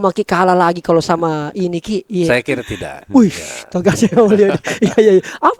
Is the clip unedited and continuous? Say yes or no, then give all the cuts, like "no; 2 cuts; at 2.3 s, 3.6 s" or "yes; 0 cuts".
yes; 0 cuts